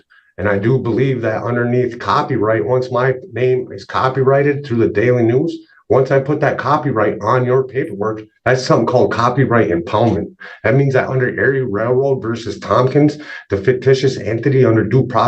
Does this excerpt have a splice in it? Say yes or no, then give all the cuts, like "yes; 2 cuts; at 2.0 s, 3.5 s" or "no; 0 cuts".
no; 0 cuts